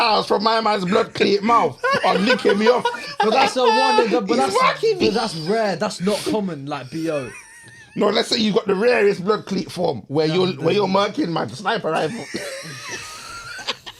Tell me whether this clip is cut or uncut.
uncut